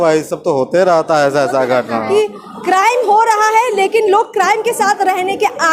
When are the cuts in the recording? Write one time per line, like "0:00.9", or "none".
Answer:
0:02.1